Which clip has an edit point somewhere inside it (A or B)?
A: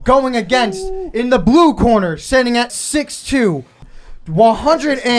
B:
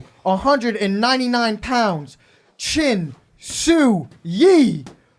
A